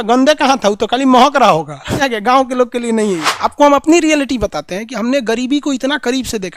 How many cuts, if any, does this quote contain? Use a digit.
2